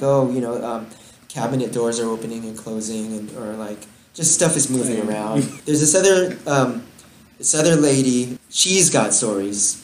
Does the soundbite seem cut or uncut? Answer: cut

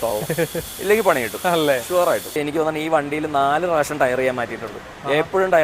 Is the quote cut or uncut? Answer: cut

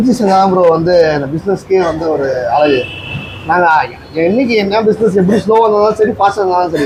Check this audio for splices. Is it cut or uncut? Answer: uncut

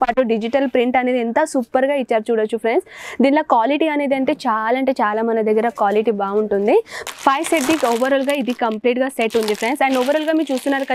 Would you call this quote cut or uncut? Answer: cut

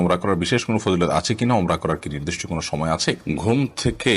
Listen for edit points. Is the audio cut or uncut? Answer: cut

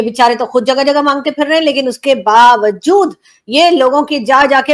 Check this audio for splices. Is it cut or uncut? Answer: uncut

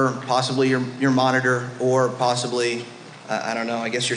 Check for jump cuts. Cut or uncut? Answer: uncut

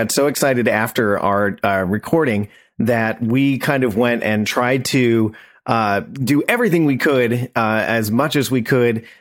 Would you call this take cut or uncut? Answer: uncut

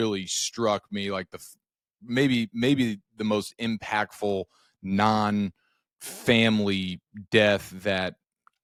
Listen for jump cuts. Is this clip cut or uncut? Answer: uncut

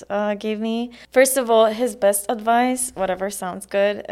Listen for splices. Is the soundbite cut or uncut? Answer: cut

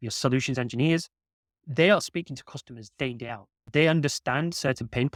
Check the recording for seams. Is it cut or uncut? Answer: uncut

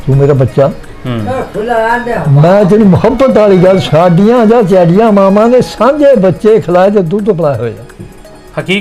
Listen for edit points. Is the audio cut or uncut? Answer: cut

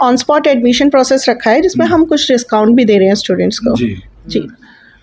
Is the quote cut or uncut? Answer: uncut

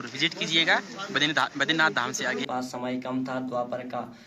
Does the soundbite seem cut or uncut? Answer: cut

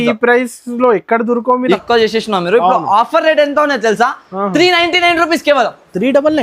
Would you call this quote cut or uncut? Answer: cut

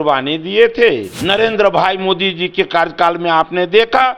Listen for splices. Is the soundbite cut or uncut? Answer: cut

